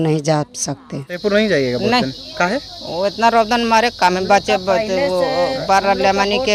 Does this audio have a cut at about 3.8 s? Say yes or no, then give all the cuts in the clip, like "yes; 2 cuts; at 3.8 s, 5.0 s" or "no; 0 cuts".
no; 1 cut; at 1.2 s